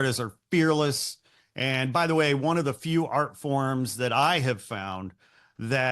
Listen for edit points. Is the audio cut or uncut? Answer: uncut